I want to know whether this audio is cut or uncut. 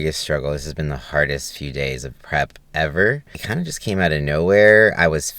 cut